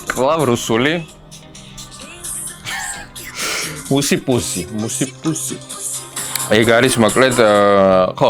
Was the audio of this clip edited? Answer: no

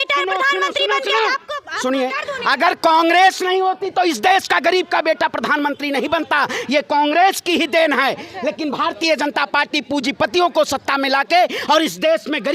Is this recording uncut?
yes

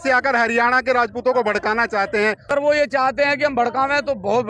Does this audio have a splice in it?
yes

